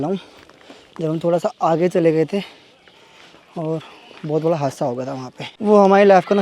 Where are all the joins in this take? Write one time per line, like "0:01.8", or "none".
0:05.5